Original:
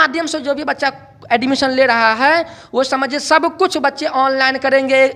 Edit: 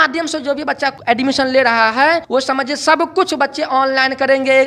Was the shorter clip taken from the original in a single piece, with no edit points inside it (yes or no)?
no